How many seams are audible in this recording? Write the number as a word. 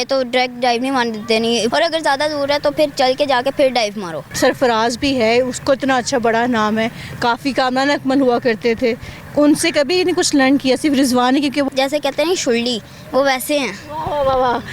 three